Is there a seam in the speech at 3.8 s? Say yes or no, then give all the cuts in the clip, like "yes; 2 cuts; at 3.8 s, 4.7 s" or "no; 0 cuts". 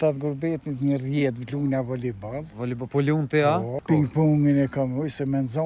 yes; 1 cut; at 3.8 s